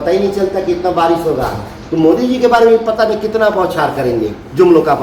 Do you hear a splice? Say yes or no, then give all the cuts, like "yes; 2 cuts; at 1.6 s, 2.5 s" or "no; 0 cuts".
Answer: no; 0 cuts